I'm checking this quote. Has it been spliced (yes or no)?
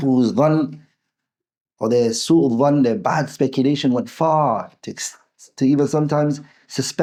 no